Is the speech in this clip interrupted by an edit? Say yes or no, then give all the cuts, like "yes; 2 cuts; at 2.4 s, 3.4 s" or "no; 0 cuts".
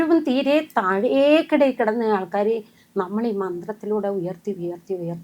no; 0 cuts